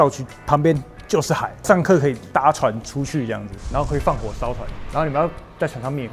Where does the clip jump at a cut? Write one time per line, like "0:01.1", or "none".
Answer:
none